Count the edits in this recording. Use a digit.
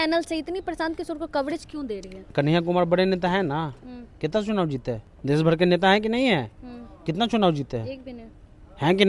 2